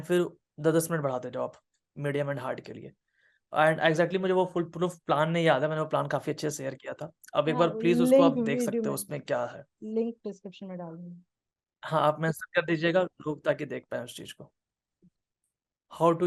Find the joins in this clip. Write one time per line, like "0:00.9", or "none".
none